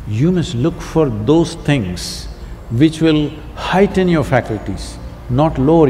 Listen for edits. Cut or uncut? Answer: uncut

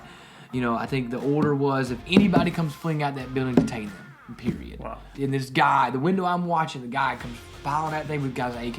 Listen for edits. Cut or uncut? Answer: cut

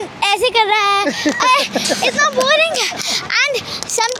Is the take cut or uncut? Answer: uncut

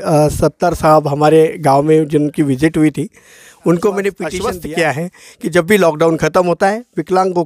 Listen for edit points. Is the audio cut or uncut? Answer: cut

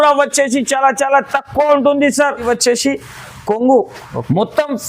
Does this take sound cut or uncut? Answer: cut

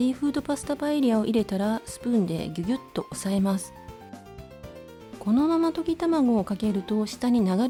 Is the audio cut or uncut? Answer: uncut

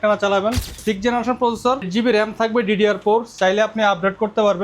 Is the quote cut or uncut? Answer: cut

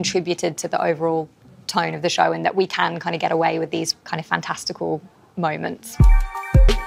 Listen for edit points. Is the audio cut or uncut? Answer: uncut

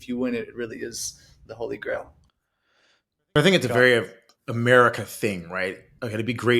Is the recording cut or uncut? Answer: uncut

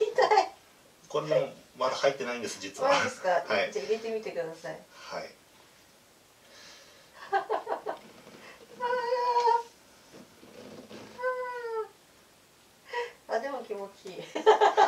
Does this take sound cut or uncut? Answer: uncut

